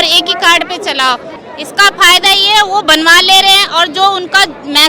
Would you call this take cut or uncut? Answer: cut